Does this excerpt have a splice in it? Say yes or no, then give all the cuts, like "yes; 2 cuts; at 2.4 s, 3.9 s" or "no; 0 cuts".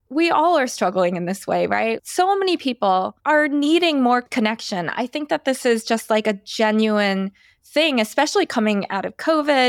no; 0 cuts